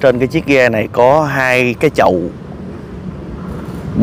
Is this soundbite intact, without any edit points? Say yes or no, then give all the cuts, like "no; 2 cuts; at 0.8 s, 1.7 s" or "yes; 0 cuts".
yes; 0 cuts